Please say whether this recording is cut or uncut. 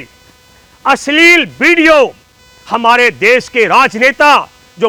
uncut